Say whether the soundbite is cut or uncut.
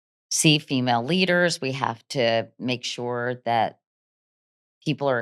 uncut